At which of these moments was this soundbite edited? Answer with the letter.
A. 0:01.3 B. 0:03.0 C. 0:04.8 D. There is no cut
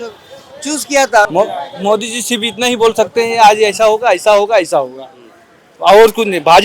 A